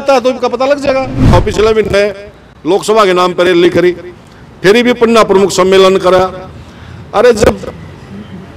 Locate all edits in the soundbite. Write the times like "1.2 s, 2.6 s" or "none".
1.3 s